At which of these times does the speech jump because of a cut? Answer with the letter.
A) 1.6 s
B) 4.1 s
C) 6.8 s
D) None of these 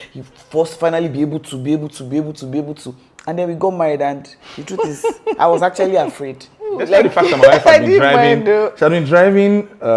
C